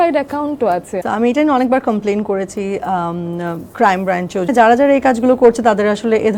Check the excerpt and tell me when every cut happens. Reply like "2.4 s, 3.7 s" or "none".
0.9 s, 4.5 s